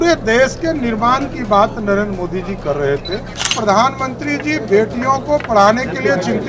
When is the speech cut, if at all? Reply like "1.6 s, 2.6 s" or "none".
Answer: 3.4 s

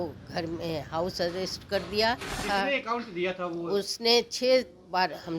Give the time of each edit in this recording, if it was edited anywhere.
2.4 s

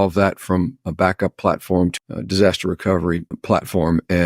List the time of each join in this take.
1.9 s, 3.3 s

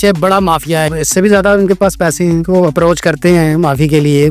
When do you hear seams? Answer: 0.9 s

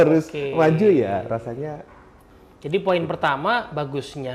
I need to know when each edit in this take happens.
none

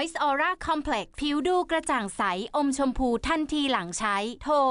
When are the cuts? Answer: none

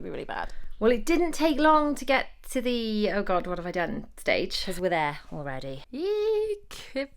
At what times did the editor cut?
0.8 s, 6.0 s

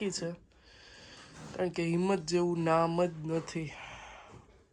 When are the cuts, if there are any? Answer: none

